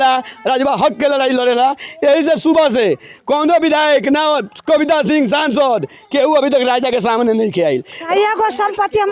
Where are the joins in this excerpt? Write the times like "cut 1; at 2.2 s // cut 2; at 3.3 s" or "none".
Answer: cut 1; at 8.0 s